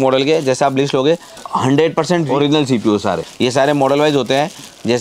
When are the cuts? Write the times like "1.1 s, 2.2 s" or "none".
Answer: 1.4 s, 2.3 s, 3.3 s